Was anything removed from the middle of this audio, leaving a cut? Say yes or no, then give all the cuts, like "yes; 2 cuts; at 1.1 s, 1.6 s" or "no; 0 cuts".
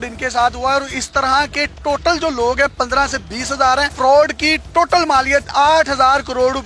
no; 0 cuts